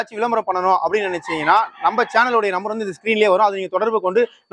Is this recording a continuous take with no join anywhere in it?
yes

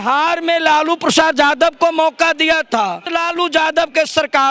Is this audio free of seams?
no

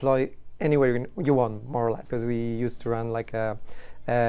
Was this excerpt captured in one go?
no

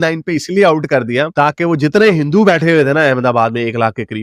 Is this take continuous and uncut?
yes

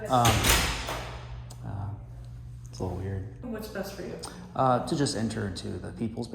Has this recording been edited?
yes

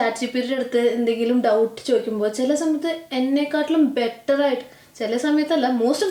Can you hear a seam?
no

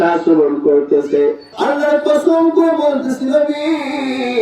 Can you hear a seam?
yes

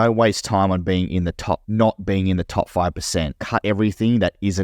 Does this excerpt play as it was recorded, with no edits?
no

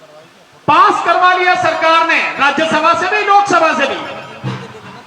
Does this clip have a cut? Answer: no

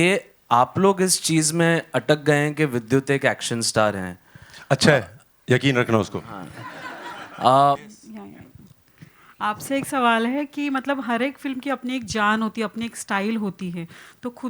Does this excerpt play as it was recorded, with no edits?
no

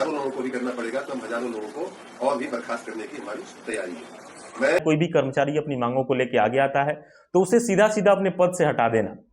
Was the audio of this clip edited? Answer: yes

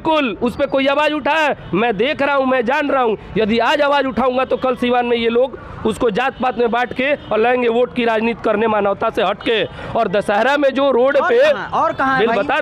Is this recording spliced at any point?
no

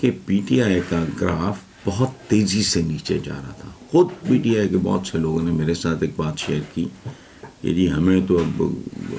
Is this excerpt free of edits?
yes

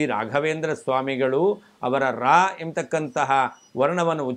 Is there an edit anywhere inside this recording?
no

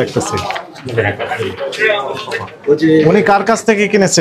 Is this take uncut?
yes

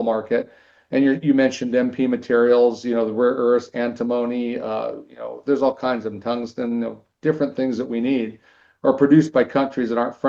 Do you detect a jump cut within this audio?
no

